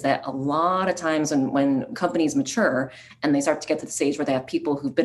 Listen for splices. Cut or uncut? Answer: cut